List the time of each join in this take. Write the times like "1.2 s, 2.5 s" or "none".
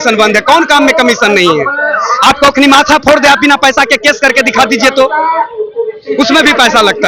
none